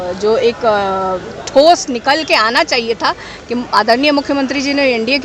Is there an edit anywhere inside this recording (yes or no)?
no